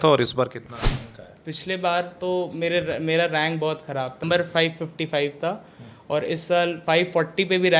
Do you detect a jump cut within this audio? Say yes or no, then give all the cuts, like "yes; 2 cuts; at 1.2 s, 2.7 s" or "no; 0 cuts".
yes; 1 cut; at 4.2 s